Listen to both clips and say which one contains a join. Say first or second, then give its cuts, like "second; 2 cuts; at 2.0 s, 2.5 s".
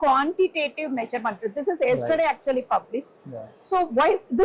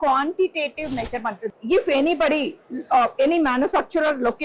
second; 1 cut; at 1.5 s